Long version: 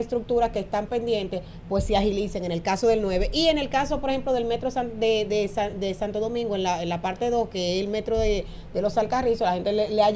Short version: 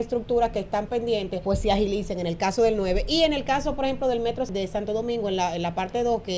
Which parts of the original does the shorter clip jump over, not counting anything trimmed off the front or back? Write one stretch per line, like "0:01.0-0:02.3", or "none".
0:01.3-0:01.6
0:04.7-0:05.7